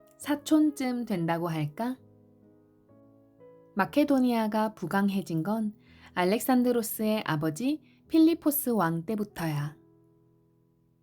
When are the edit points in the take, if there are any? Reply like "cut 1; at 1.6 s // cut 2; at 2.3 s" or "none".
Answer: cut 1; at 2.0 s // cut 2; at 3.7 s